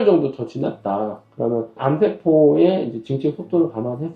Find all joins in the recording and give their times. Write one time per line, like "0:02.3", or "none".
0:01.8